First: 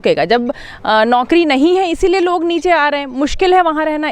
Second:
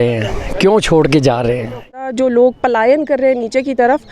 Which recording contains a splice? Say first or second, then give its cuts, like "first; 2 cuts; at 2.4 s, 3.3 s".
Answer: second; 1 cut; at 1.9 s